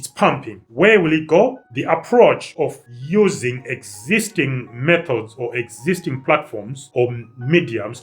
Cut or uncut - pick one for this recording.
cut